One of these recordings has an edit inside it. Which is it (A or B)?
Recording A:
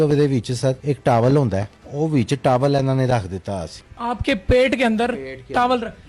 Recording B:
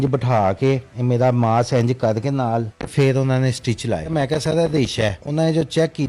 B